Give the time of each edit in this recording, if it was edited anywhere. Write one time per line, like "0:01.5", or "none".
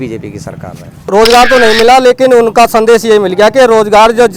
0:01.1